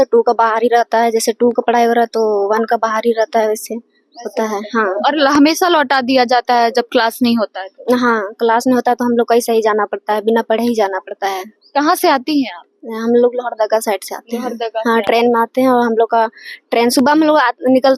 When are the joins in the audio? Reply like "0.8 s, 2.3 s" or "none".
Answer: none

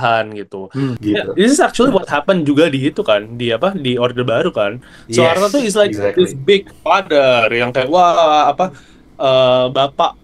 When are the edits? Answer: 1.0 s

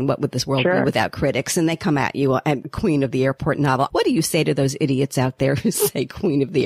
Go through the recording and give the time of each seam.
2.7 s, 3.9 s

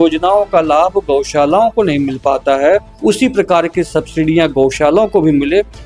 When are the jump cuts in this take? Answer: 2.9 s

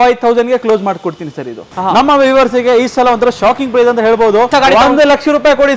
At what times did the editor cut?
1.7 s, 4.5 s

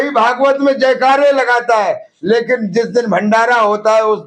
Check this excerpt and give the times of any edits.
none

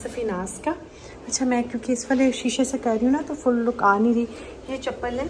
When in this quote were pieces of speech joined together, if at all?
none

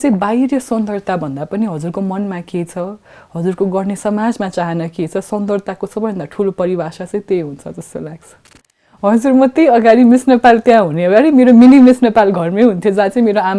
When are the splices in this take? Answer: 8.7 s

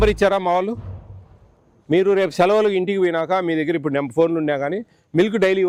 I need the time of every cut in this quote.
none

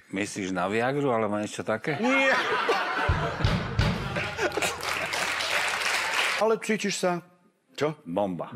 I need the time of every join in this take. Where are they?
6.4 s

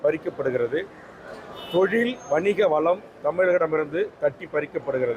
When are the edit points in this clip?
none

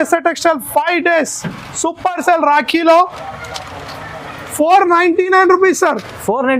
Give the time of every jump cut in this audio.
none

